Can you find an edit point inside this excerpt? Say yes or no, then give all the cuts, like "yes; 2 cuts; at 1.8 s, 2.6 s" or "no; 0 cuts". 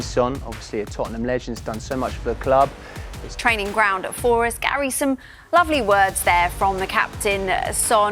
yes; 1 cut; at 3.3 s